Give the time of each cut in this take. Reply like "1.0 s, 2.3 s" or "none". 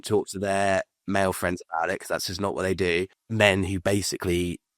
3.2 s

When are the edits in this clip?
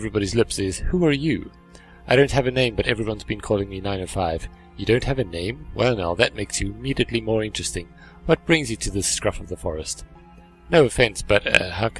3.0 s

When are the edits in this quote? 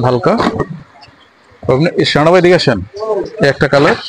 none

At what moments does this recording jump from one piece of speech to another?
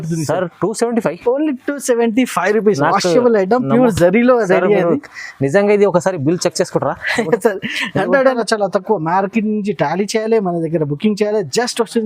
8.4 s

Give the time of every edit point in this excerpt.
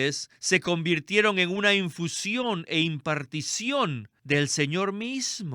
4.1 s

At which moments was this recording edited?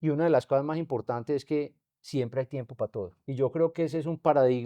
3.2 s

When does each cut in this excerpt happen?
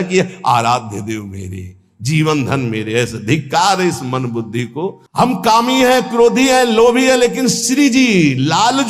5.0 s

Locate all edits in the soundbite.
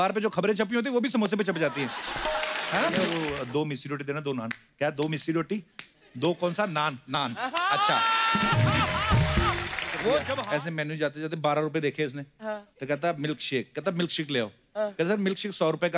3.1 s, 10.3 s

